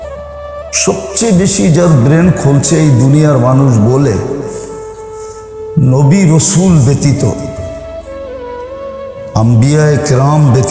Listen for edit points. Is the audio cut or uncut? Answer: cut